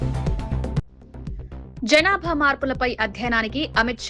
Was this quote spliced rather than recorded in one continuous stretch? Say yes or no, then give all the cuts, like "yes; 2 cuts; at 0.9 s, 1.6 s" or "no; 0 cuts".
yes; 1 cut; at 0.9 s